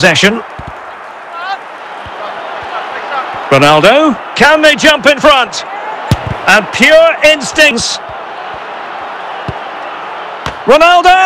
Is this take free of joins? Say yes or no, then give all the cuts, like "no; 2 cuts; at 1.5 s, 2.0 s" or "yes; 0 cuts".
no; 1 cut; at 7.8 s